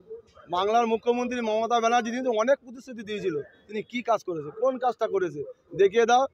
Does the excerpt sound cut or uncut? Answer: uncut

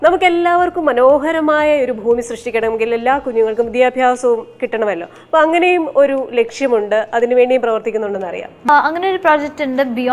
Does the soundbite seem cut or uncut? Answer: cut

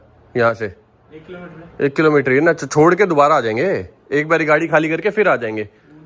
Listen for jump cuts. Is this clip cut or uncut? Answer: uncut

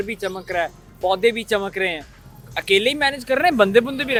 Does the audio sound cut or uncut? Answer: uncut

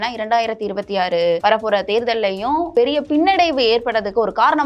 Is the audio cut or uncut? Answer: cut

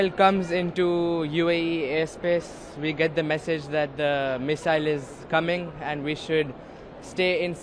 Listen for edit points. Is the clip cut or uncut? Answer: uncut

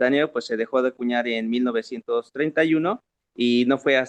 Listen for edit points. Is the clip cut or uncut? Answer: uncut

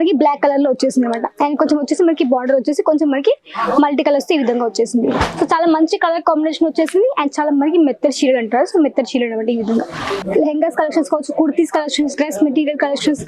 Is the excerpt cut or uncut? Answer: cut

